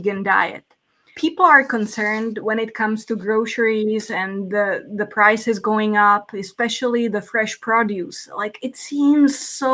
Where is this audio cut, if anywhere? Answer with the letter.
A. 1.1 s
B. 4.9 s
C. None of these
A